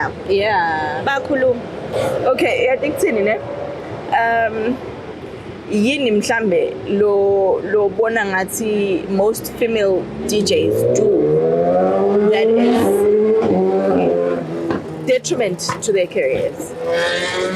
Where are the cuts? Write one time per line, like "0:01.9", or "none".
none